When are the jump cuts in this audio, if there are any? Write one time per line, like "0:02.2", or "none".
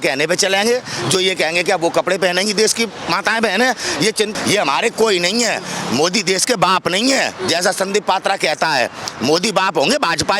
0:04.3